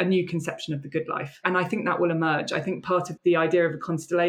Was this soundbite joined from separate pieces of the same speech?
yes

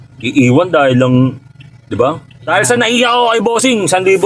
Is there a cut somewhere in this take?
no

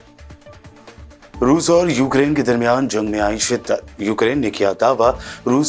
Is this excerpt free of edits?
no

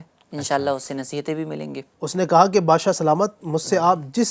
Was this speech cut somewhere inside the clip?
yes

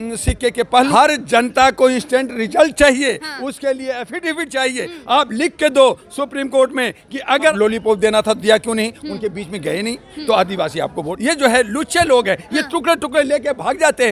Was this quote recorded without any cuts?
no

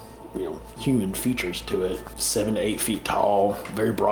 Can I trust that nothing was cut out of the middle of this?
no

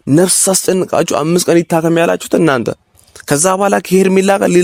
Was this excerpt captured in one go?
yes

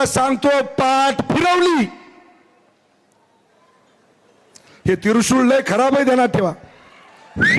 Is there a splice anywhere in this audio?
no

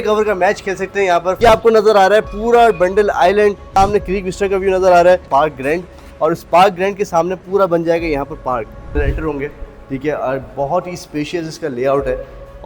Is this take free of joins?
no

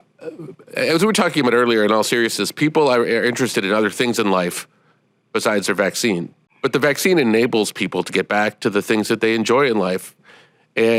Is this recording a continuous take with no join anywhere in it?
yes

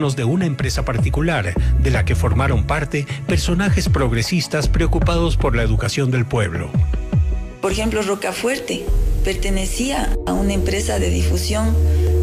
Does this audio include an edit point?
no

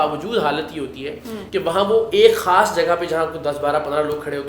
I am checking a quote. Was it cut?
yes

